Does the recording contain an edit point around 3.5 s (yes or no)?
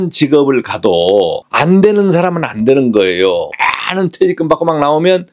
yes